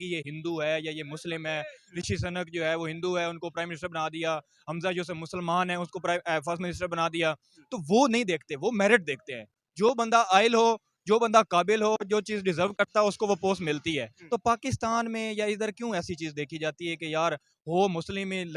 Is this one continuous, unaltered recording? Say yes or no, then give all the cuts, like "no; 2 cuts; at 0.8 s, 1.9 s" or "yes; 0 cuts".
yes; 0 cuts